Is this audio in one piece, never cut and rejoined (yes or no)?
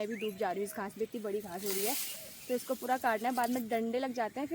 yes